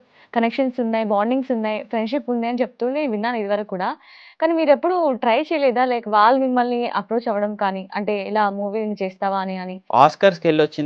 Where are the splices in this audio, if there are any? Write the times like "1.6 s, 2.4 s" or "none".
9.8 s